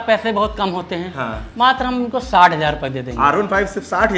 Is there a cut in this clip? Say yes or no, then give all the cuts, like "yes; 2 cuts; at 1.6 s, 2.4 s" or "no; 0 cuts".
no; 0 cuts